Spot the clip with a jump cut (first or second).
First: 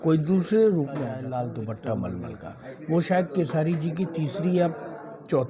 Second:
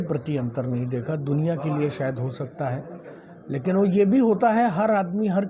first